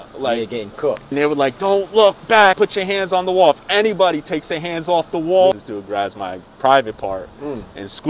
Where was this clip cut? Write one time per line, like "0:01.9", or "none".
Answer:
0:01.1
0:02.6
0:05.6